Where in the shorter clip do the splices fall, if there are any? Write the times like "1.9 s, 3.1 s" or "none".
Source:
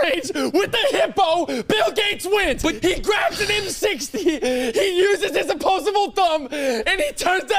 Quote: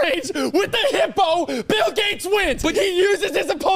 2.7 s